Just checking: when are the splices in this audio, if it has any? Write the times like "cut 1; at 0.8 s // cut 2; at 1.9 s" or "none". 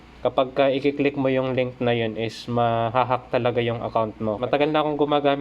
cut 1; at 4.4 s